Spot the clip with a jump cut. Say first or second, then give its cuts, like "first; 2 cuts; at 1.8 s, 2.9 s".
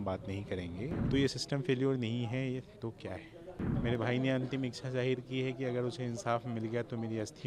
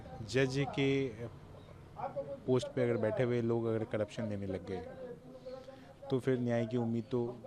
first; 2 cuts; at 1.0 s, 3.7 s